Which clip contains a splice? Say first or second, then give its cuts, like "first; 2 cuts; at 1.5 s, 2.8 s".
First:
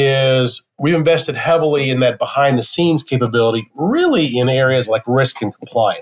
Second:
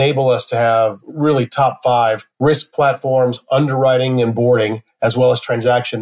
second; 2 cuts; at 1.0 s, 4.8 s